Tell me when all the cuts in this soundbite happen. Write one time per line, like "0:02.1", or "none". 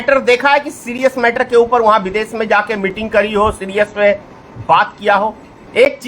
none